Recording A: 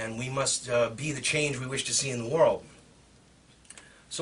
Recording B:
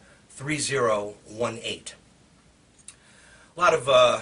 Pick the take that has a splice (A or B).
A